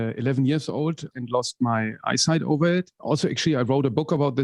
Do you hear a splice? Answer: yes; 2 cuts; at 1.2 s, 3.0 s

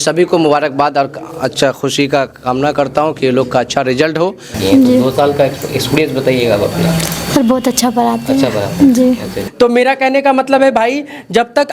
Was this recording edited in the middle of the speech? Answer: yes; 2 cuts; at 4.5 s, 9.4 s

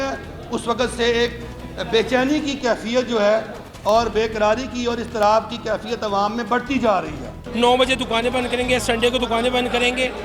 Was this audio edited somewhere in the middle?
yes; 1 cut; at 7.4 s

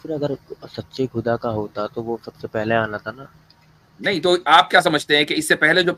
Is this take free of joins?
yes; 0 cuts

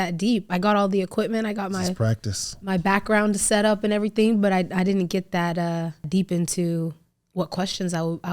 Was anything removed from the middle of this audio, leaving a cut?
yes; 1 cut; at 6.1 s

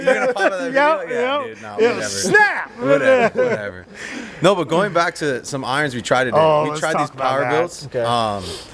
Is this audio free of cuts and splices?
yes; 0 cuts

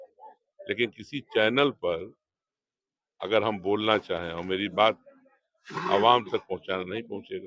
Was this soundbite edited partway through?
no; 0 cuts

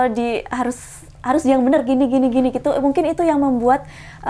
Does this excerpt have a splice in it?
no; 0 cuts

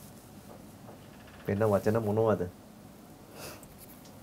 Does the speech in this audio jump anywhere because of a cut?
no; 0 cuts

